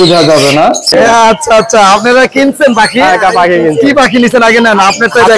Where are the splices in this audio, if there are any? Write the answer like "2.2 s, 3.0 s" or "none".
0.9 s